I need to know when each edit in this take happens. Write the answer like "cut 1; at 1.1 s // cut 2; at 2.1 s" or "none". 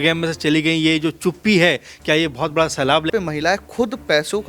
cut 1; at 3.1 s